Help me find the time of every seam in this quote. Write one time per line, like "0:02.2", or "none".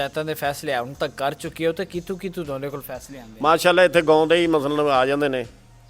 none